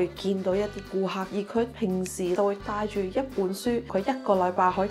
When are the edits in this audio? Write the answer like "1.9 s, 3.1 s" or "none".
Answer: 1.2 s